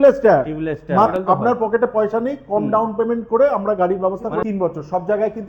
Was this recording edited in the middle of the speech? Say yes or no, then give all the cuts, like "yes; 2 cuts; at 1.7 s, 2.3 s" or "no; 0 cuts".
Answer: yes; 2 cuts; at 1.1 s, 4.4 s